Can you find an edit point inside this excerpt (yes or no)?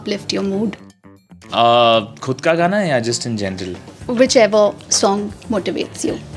no